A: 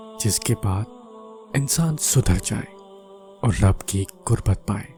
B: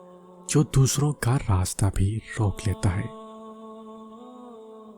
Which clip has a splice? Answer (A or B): B